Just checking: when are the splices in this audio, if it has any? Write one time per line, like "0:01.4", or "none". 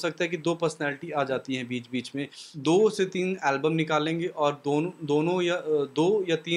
0:02.4